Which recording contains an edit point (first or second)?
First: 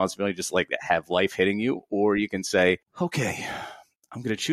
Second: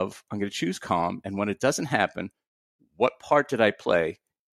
first